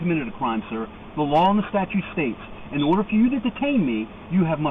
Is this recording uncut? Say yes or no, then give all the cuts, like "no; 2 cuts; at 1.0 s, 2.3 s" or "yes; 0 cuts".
yes; 0 cuts